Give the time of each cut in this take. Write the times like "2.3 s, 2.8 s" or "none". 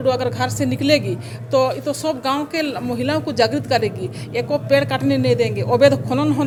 none